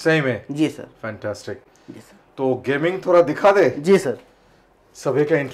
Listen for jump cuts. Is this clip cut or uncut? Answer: uncut